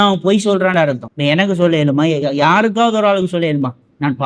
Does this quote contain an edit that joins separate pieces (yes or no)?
yes